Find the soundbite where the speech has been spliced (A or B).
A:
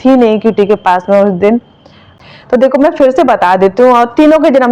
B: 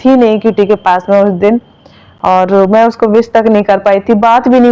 A